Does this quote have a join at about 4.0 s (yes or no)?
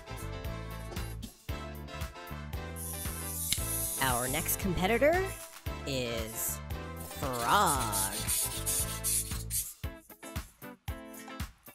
yes